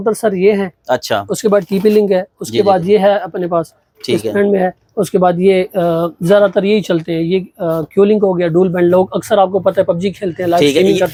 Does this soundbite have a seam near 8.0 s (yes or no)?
no